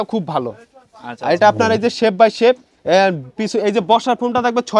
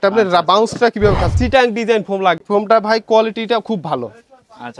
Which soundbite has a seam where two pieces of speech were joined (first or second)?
second